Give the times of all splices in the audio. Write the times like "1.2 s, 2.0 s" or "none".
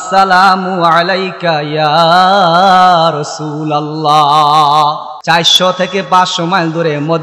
5.1 s